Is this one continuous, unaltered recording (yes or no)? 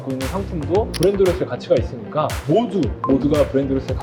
no